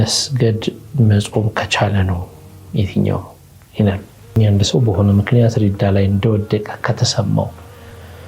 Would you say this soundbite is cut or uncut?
cut